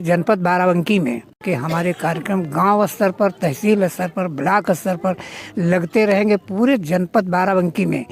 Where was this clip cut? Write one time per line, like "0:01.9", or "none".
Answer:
0:01.4